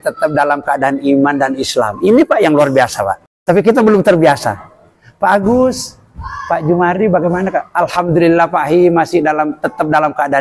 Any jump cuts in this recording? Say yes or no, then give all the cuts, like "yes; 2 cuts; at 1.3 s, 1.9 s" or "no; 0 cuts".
yes; 1 cut; at 3.2 s